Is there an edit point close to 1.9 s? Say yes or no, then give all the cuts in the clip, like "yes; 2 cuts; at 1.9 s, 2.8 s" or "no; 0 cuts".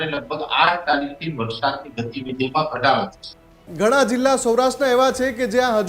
no; 1 cut; at 3.6 s